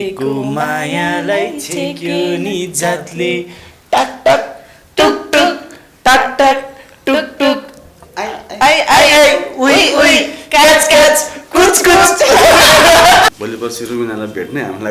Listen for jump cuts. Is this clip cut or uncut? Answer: cut